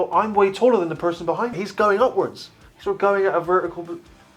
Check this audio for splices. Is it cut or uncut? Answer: cut